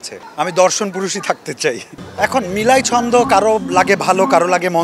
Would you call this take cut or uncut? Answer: cut